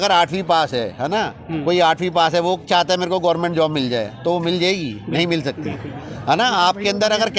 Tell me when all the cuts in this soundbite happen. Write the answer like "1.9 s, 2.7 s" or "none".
none